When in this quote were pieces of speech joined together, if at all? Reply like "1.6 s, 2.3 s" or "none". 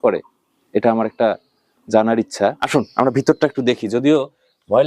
2.6 s

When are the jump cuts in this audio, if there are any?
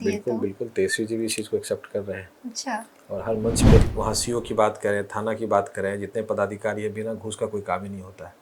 3.8 s

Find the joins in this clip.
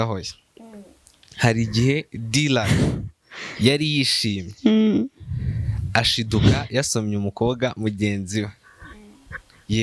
none

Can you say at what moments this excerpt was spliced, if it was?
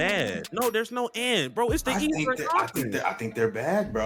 none

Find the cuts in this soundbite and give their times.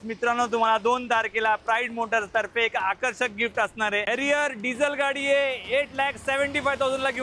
4.1 s

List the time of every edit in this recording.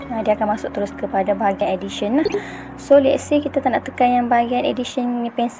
none

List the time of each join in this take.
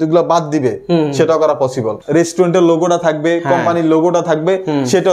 1.9 s

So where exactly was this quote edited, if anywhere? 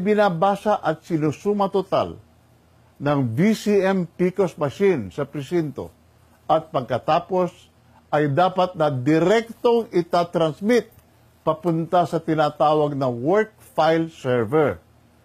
2.2 s

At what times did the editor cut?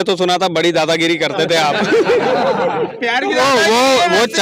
2.9 s

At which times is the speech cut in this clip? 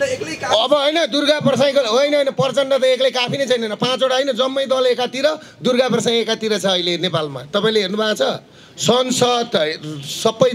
none

